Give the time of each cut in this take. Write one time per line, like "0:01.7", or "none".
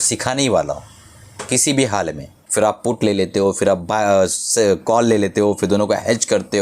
0:02.4